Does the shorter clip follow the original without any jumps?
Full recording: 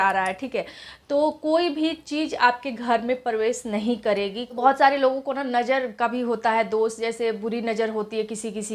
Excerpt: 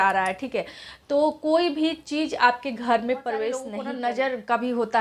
no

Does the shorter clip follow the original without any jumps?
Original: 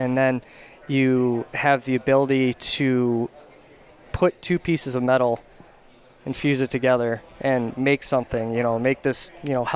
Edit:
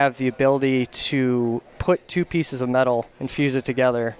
no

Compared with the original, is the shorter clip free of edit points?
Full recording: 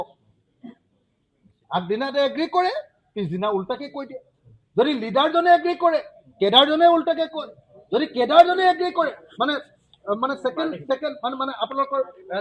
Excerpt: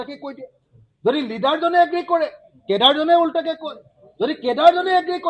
yes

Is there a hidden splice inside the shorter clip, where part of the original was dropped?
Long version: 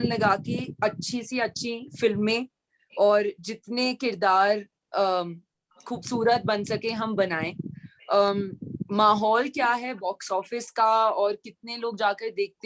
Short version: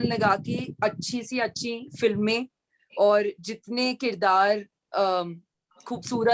no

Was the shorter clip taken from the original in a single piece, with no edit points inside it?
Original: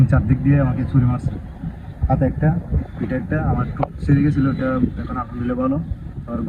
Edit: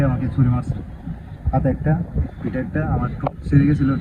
yes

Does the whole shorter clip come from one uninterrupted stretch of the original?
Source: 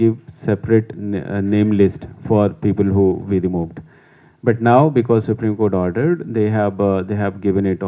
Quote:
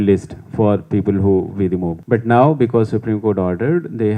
no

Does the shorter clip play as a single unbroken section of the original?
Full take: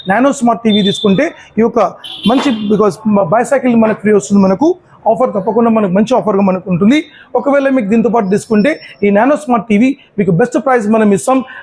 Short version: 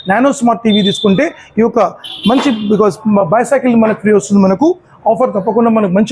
yes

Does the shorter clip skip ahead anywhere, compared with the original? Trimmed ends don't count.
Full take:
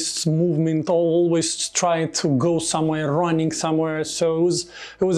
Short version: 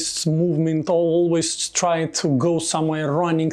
no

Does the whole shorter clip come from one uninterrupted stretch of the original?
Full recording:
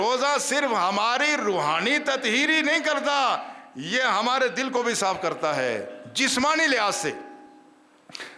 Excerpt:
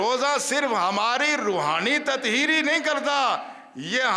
yes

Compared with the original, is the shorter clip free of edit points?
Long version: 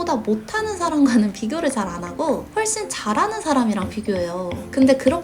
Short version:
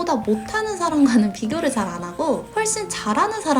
yes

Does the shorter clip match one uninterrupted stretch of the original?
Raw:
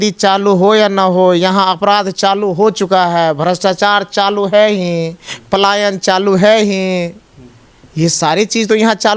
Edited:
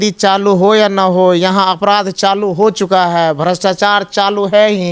yes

